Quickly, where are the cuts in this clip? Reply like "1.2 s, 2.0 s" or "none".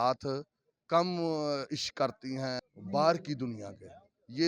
2.6 s